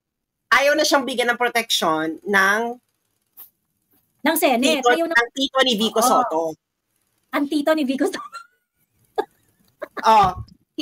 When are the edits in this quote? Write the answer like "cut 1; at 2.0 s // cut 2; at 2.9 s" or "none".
none